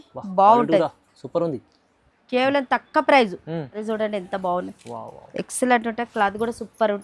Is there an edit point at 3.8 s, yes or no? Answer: yes